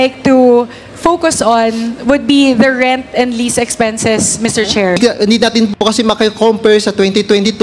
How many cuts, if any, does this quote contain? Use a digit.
1